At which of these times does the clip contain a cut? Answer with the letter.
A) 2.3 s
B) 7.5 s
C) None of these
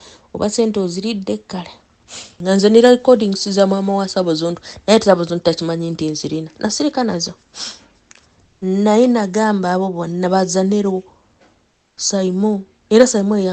A